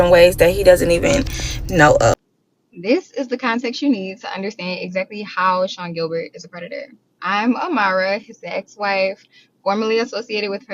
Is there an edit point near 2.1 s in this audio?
yes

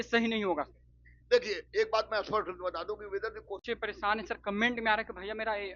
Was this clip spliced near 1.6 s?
no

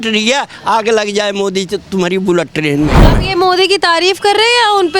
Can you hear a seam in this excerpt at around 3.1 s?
yes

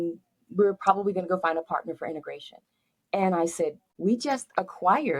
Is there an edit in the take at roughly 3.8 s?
yes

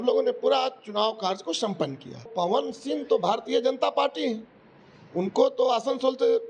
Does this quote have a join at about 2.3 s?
yes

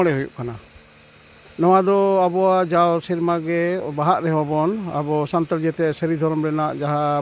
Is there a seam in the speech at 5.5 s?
no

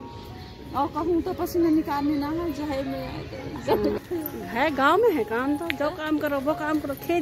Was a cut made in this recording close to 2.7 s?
no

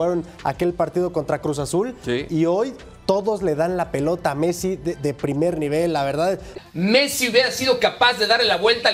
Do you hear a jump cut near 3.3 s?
no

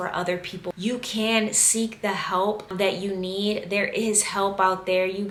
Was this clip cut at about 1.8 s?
no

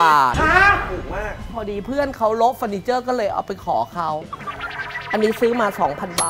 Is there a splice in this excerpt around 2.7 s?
no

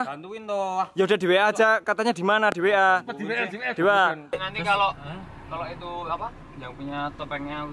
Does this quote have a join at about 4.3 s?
yes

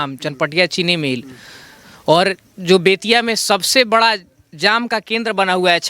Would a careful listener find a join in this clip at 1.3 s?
no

